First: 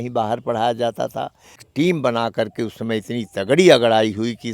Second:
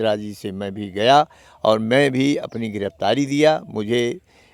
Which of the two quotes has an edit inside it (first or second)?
first